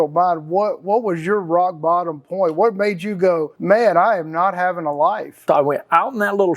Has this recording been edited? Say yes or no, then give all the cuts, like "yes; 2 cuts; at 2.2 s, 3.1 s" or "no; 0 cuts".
yes; 2 cuts; at 3.5 s, 5.4 s